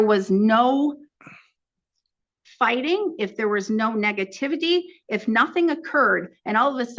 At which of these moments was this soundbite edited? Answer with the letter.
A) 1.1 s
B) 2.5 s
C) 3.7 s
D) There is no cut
D